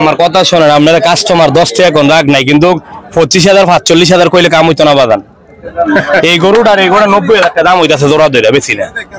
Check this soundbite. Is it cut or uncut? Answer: uncut